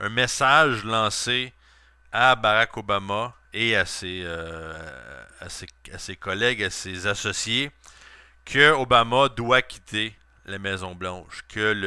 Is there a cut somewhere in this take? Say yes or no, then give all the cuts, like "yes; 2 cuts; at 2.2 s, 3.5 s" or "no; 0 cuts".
yes; 1 cut; at 5.3 s